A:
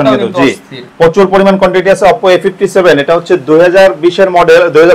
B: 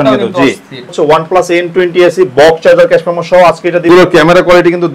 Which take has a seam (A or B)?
B